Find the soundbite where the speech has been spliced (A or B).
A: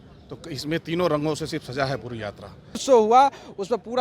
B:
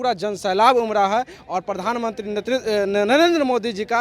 A